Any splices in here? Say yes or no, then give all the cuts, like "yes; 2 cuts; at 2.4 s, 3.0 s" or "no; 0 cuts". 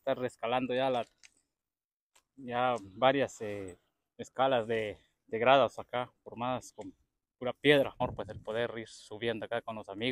yes; 1 cut; at 8.0 s